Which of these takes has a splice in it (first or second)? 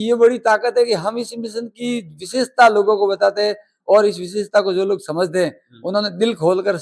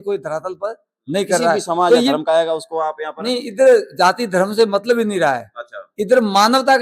second